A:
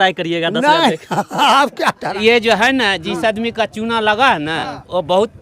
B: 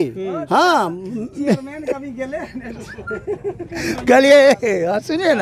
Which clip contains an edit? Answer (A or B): A